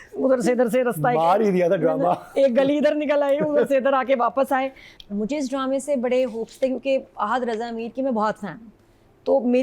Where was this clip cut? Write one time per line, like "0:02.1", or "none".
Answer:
none